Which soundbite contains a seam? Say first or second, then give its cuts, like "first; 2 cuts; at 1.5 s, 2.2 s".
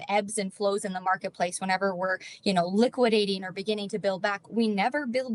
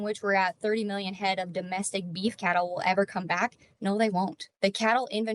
second; 1 cut; at 4.4 s